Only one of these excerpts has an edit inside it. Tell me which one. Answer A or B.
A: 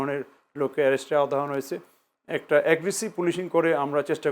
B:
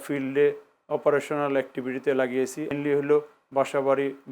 B